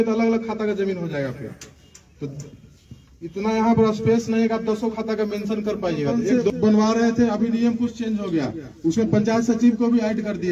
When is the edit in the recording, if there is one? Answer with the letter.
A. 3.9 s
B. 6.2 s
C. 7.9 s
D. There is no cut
B